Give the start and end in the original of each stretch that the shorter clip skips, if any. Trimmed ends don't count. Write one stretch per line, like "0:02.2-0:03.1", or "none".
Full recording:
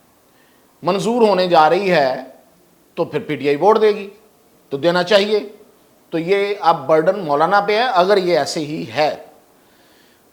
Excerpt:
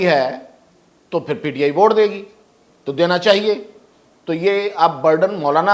none

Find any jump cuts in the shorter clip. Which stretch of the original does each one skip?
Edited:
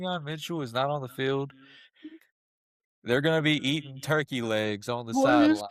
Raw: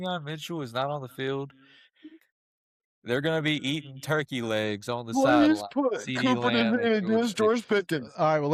none

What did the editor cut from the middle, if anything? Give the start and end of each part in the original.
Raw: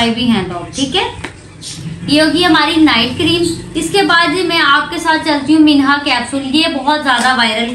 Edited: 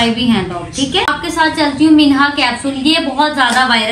0:01.2-0:04.8

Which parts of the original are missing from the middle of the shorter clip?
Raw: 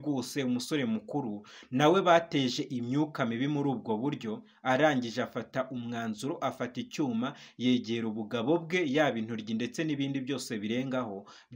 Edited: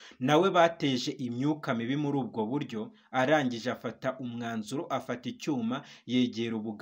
none

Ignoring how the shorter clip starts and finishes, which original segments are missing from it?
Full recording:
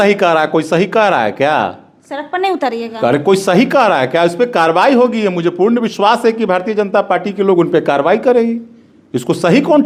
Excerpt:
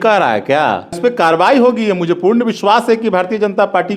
0:01.9-0:04.3

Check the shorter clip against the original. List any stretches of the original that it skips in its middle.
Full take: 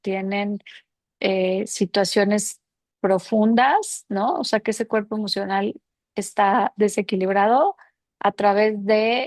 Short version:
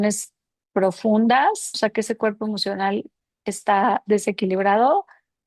0:04.0-0:04.4

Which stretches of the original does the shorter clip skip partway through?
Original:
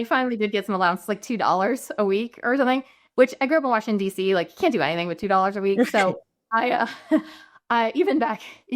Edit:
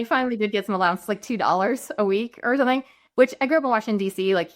none

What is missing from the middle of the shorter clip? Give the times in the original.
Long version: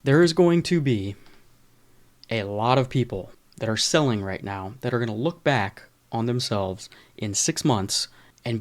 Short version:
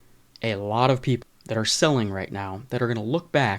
0:03.2-0:03.4

